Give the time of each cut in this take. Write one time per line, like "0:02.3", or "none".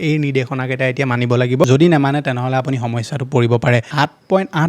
0:01.6
0:03.9